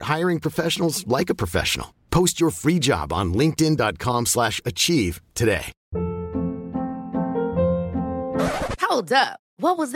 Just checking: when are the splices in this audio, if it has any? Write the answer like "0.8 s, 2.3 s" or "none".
5.8 s